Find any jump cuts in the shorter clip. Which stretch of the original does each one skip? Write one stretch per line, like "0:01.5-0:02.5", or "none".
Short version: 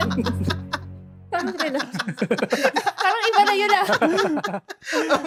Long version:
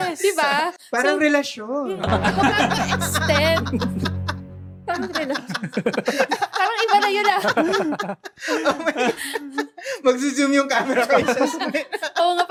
none